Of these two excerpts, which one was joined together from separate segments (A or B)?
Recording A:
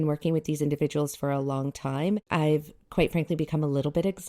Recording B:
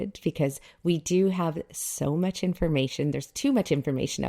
A